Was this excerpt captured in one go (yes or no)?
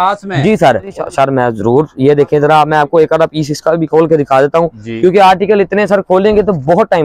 no